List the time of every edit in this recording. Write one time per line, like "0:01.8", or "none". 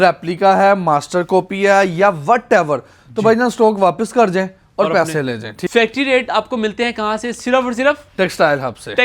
0:05.6

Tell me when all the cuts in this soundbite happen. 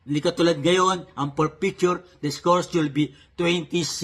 0:02.8

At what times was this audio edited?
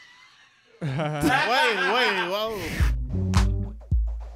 0:02.7

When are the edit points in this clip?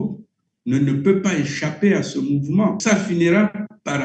0:02.8

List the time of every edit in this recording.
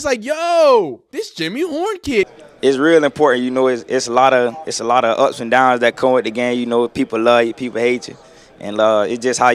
0:01.0
0:02.3

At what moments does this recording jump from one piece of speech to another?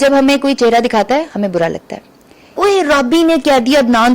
0:02.6

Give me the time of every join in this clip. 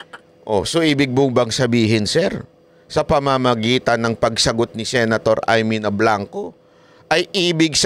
none

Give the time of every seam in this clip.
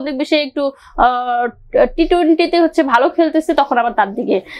none

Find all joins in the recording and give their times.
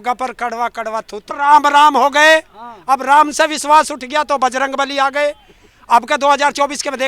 0:01.2

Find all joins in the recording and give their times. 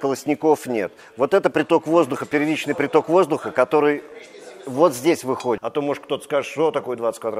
0:05.6

